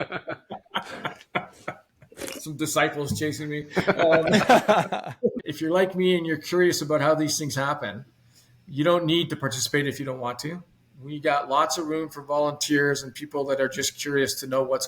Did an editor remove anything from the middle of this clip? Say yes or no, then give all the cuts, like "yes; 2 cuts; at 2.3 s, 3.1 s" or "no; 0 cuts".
yes; 1 cut; at 5.4 s